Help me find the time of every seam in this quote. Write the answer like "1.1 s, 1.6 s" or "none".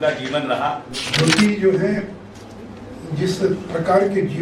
1.0 s